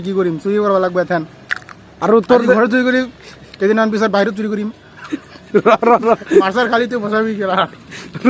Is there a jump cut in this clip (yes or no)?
no